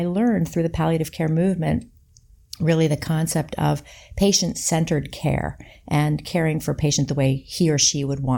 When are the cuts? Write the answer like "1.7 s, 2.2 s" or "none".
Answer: none